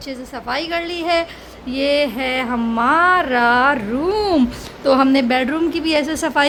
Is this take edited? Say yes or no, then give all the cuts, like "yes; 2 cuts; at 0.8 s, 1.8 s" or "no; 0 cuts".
no; 0 cuts